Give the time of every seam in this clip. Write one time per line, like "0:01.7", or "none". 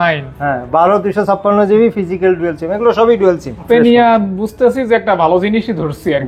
0:03.6